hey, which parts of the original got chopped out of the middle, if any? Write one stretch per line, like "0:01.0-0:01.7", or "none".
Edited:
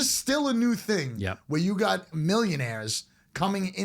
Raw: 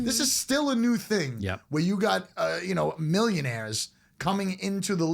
0:02.3-0:03.0